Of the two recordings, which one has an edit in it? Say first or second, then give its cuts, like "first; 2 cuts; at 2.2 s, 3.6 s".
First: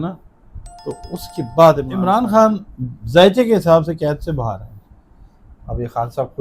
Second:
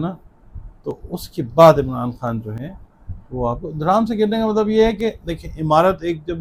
first; 1 cut; at 1.9 s